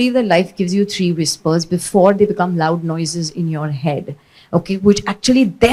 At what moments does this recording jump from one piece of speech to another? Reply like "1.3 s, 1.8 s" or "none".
none